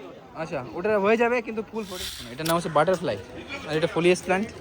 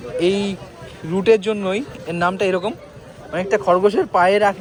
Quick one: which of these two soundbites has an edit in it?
first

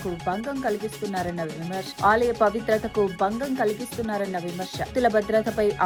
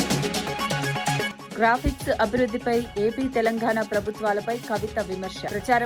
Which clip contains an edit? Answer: second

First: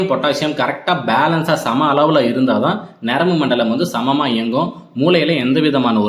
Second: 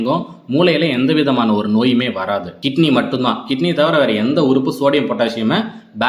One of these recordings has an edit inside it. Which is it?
second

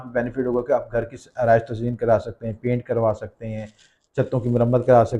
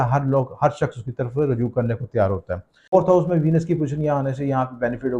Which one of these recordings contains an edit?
second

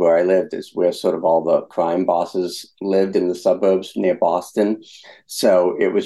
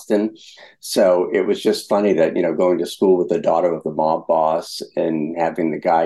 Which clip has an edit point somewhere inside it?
first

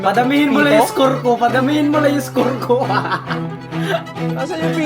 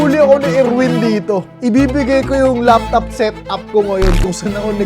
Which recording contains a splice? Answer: second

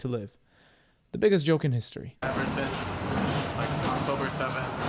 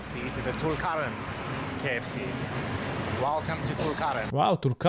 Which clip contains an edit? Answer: first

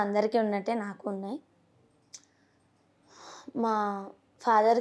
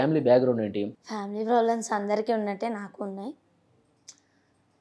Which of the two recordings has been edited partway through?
second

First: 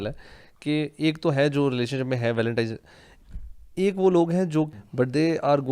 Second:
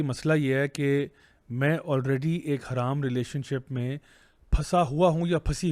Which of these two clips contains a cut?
first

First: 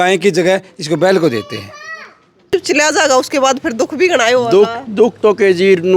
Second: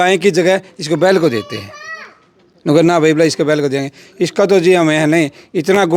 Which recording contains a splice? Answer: first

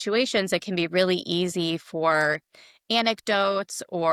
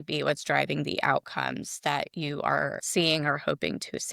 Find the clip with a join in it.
second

